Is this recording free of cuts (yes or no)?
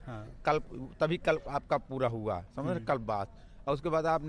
yes